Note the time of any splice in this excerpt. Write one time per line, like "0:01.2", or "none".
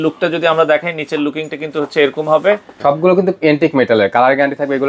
0:02.8